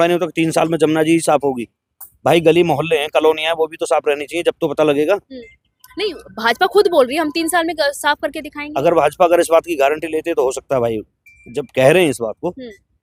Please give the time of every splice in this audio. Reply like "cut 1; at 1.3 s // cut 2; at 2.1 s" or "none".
none